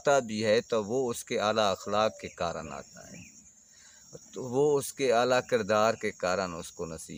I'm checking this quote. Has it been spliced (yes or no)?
no